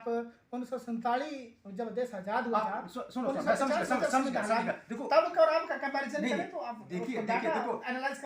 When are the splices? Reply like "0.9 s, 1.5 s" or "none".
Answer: none